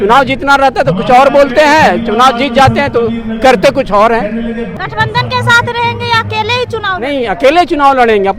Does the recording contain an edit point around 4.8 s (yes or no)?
yes